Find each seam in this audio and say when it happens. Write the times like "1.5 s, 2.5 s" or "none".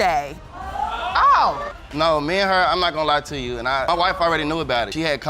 1.8 s, 3.9 s